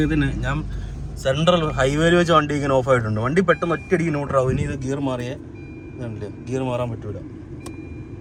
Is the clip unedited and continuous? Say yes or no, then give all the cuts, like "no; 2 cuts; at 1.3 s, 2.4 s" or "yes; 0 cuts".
yes; 0 cuts